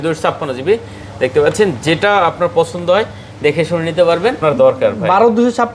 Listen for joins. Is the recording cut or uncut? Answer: cut